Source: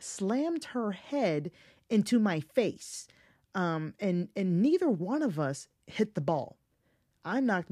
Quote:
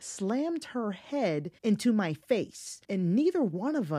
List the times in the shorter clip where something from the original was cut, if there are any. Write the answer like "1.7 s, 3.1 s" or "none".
1.5 s, 2.8 s